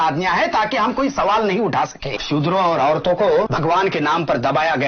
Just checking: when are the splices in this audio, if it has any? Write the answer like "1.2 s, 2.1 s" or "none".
2.2 s, 3.5 s